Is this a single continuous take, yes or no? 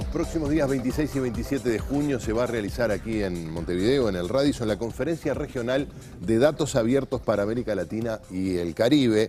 yes